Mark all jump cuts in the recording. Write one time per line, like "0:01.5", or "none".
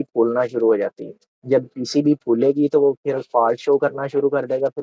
none